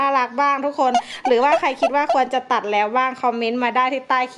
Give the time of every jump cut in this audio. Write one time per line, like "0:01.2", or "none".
none

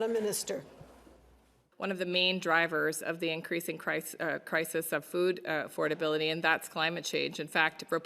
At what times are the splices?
0:01.6

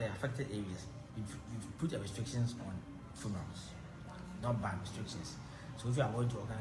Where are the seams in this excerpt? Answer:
0:01.0

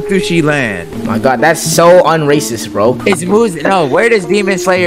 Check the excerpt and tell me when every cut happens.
none

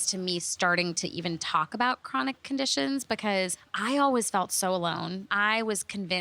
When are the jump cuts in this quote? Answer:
0:05.2

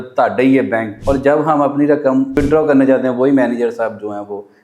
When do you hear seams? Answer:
0:00.9
0:02.4

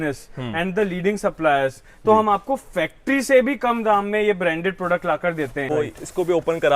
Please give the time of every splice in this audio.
0:05.7

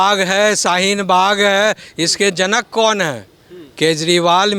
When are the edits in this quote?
none

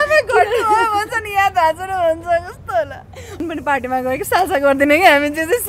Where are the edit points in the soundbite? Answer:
0:03.3

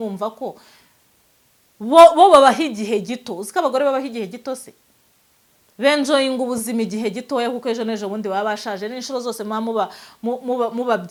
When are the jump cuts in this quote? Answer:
none

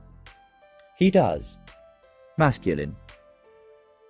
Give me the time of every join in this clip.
0:01.0

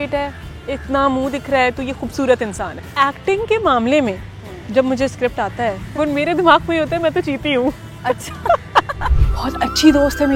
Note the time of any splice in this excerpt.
0:02.8
0:05.8
0:09.0

